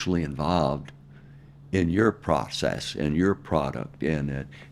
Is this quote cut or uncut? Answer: uncut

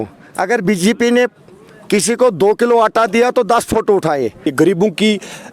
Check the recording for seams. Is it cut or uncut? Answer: cut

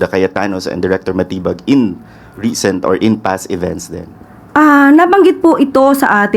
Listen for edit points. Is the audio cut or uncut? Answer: uncut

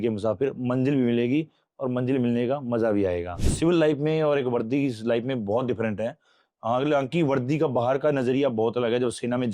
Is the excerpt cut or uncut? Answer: cut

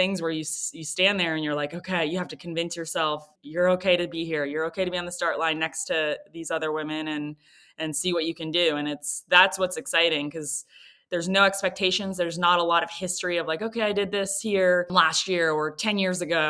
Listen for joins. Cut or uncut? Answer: cut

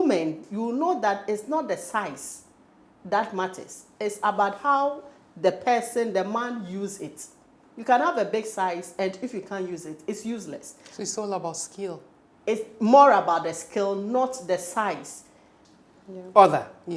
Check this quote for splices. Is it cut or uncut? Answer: cut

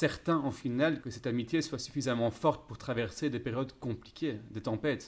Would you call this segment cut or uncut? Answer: cut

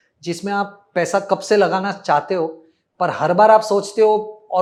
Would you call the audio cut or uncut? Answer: uncut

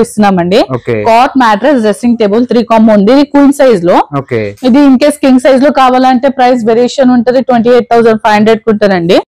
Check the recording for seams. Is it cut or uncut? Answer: uncut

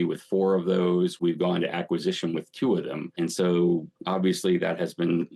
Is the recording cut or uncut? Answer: cut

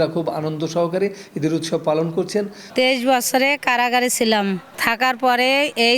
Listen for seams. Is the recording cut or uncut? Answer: cut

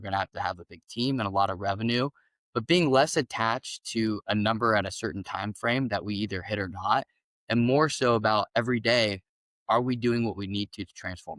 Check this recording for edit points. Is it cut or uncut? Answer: uncut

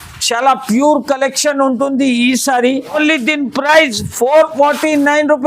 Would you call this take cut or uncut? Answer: cut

